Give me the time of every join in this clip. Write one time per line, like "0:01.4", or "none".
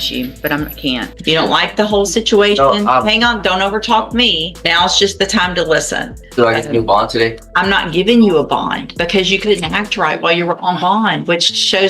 0:01.1
0:04.5
0:06.2
0:07.4
0:08.8